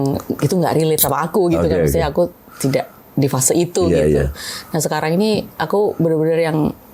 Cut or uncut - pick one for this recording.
uncut